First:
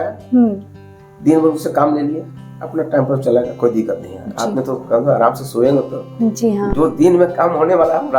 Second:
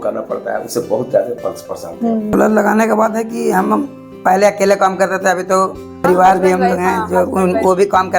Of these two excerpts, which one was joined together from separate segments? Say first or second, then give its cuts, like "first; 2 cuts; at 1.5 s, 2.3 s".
second; 2 cuts; at 2.3 s, 6.0 s